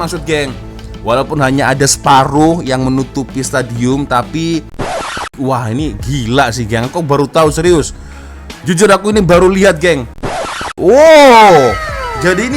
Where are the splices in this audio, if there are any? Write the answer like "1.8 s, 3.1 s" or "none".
5.3 s, 10.4 s

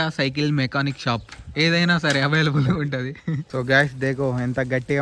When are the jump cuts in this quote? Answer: 3.4 s

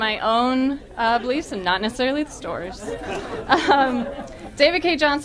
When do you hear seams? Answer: 3.6 s

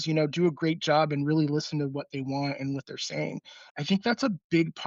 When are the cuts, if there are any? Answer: 3.6 s

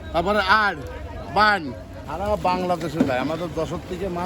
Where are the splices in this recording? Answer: 2.0 s

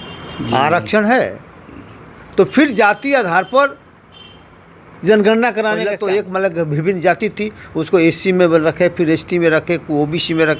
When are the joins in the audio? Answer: 5.9 s

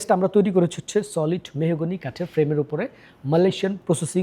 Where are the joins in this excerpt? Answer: none

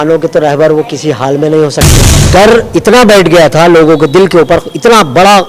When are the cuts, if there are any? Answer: 2.2 s

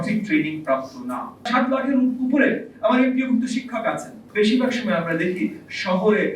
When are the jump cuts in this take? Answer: 1.5 s, 4.2 s

